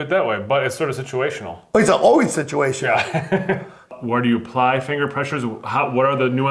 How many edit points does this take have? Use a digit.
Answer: 1